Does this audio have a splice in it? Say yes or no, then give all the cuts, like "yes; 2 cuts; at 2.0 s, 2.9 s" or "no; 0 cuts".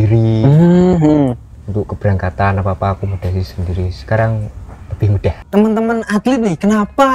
yes; 1 cut; at 5.4 s